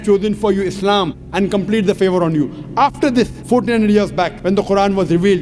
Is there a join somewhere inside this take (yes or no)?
yes